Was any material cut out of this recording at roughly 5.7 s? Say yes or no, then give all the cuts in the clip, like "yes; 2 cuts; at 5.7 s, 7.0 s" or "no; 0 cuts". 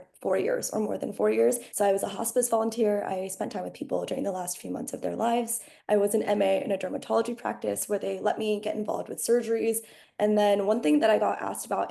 yes; 3 cuts; at 1.7 s, 5.7 s, 10.0 s